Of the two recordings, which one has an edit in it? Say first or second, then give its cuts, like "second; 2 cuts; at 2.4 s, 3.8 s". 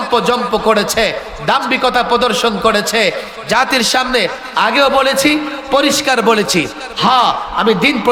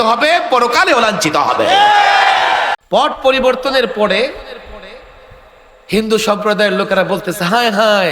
second; 1 cut; at 2.8 s